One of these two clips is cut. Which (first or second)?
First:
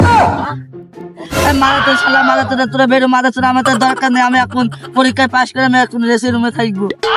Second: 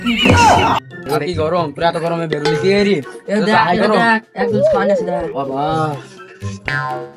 second